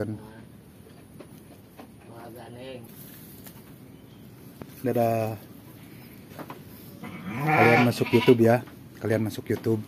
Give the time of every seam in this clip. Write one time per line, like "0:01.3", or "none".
0:02.9